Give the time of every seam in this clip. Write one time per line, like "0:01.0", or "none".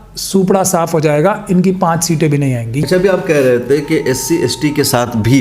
0:02.7

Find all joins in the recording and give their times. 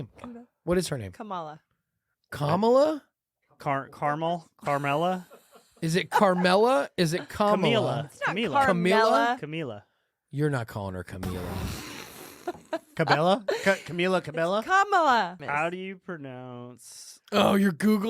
0:15.4

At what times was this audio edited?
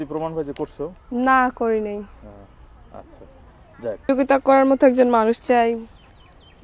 0:04.1

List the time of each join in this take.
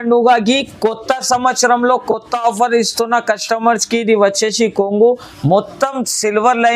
none

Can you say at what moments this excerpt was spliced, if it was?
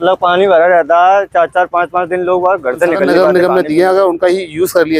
0:03.1

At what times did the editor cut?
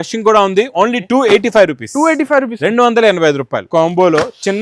0:03.7

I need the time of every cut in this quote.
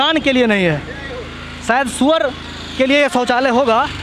none

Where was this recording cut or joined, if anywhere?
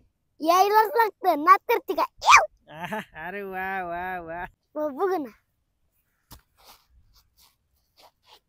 0:04.6

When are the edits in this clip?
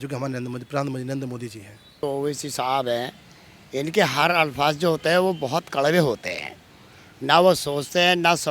0:02.0

